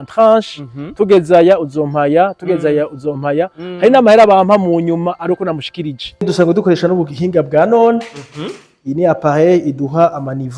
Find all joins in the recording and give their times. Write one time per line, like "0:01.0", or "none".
0:06.3